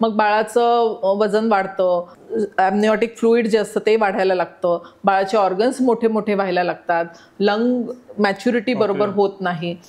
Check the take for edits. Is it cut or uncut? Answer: cut